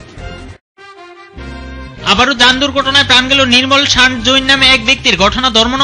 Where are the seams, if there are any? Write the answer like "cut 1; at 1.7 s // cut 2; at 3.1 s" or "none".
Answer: cut 1; at 1.8 s